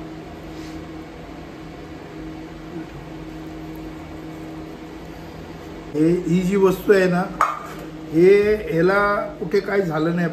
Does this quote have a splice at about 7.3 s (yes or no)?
no